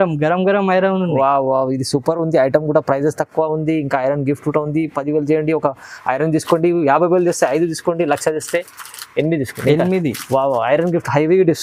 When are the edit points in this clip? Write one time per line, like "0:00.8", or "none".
none

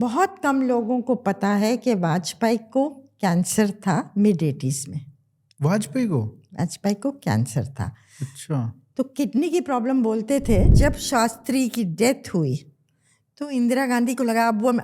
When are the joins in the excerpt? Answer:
0:10.7

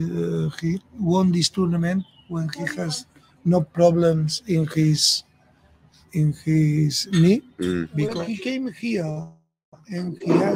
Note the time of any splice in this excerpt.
0:08.0

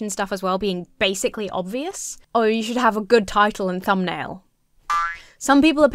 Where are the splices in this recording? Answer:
0:02.2

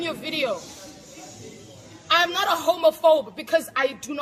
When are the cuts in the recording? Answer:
none

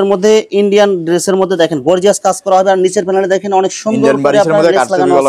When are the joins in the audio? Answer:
none

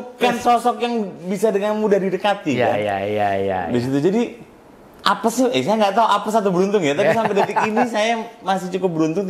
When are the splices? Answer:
none

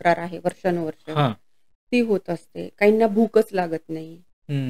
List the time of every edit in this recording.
none

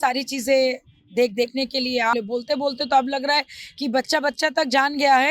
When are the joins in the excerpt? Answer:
0:02.1

